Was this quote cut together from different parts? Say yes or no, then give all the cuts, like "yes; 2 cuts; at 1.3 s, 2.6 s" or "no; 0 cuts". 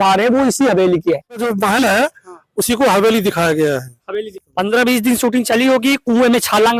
yes; 1 cut; at 1.5 s